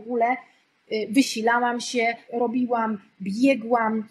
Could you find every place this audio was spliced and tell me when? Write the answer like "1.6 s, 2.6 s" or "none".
2.2 s